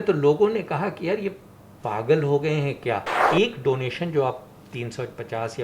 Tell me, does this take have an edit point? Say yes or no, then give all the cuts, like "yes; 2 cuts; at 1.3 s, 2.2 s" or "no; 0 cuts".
yes; 1 cut; at 3.2 s